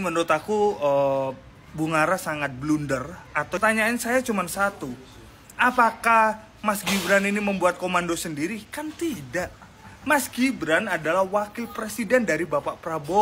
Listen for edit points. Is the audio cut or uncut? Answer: cut